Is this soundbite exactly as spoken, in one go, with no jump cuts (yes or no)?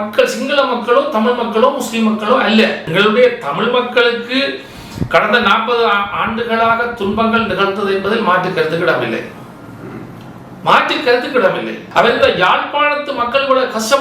no